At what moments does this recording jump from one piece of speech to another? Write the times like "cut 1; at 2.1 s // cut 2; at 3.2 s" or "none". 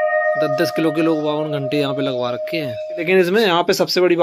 cut 1; at 3.0 s